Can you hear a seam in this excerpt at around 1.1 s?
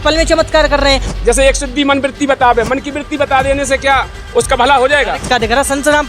yes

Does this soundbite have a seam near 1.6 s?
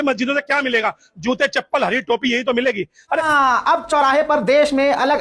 no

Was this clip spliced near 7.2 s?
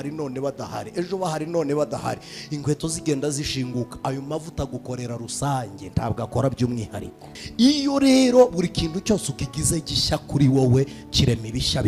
yes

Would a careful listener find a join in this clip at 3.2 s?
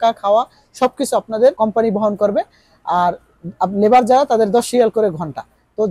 no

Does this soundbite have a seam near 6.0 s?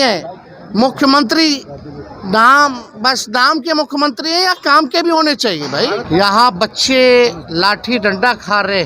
yes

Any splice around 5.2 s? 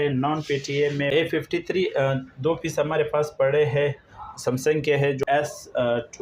yes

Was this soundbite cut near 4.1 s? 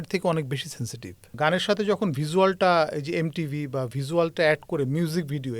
no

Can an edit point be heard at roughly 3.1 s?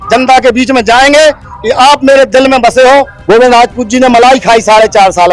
yes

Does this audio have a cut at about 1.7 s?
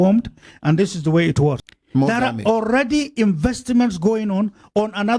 yes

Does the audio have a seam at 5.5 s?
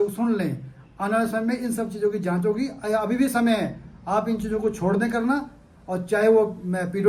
no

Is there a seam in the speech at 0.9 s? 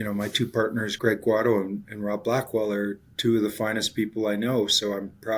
yes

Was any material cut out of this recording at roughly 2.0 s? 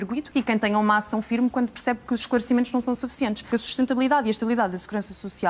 no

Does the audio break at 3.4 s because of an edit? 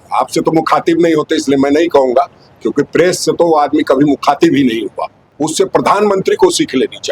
no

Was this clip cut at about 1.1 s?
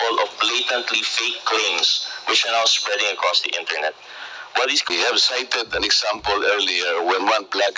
no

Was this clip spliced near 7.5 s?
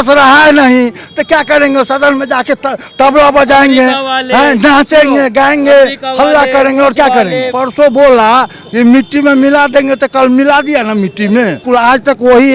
yes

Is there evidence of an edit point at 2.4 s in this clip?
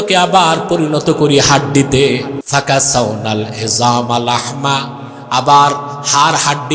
yes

